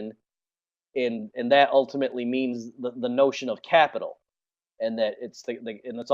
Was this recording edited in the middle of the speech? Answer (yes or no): yes